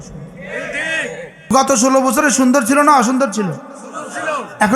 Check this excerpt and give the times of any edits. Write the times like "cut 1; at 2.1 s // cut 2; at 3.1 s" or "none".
cut 1; at 1.5 s